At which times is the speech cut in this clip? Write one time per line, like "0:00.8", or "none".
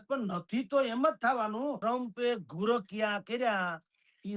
0:01.8